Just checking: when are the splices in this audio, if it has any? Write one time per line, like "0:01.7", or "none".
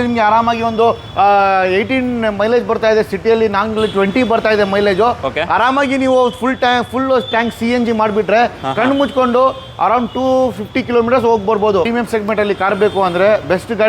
0:11.9